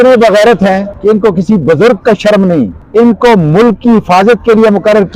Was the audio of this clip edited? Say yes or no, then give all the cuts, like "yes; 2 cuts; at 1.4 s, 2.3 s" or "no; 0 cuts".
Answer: yes; 2 cuts; at 0.9 s, 2.8 s